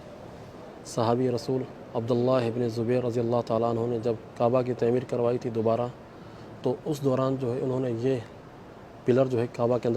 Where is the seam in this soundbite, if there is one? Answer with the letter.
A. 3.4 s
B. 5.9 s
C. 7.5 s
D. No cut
D